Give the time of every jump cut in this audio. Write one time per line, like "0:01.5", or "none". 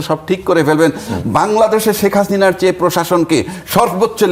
none